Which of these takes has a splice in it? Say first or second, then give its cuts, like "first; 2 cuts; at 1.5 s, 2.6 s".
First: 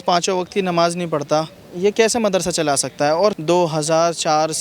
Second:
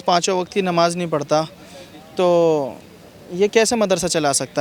first; 2 cuts; at 1.6 s, 3.4 s